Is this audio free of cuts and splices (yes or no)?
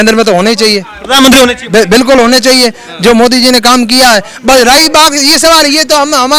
yes